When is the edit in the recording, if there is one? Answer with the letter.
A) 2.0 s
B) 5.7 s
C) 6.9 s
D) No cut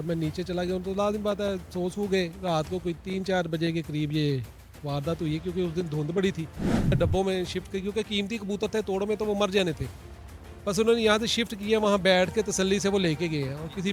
C